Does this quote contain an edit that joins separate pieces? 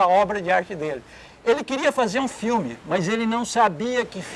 no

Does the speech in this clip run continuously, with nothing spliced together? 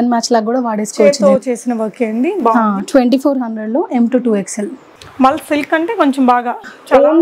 yes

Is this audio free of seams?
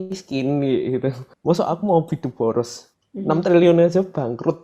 no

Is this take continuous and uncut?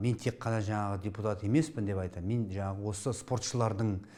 yes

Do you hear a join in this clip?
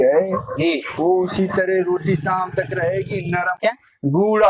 yes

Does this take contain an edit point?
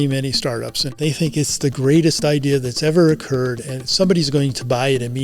yes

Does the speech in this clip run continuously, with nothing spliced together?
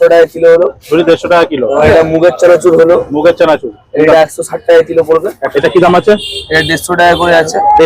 no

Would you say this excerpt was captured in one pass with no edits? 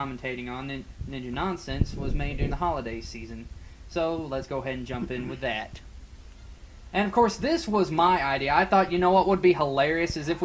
no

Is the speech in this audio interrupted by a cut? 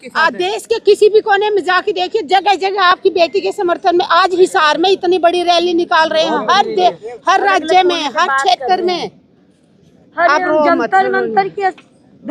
no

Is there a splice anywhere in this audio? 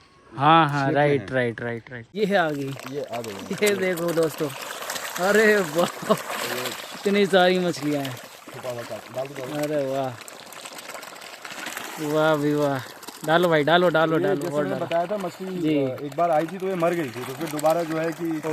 yes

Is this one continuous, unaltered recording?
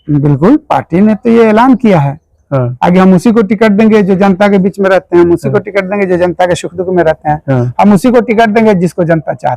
yes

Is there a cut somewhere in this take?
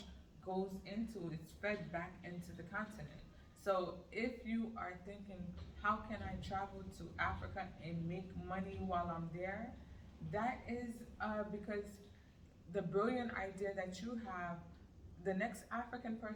no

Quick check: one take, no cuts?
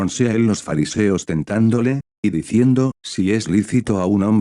no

